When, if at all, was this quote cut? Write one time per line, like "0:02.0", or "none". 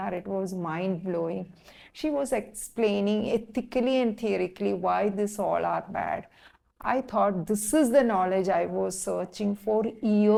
none